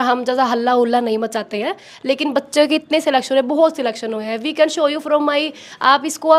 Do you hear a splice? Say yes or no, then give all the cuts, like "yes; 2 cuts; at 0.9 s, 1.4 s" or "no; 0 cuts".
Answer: no; 0 cuts